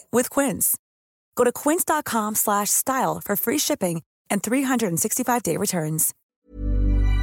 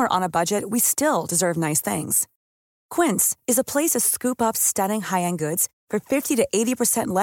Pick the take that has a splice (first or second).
first